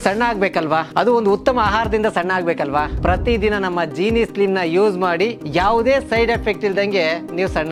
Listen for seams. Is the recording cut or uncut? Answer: uncut